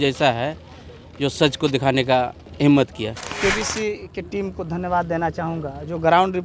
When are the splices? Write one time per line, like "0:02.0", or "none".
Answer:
0:02.4
0:03.2